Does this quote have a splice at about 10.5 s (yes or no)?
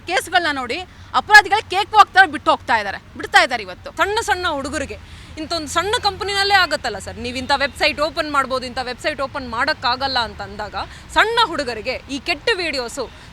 no